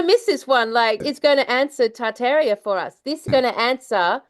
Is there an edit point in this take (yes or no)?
yes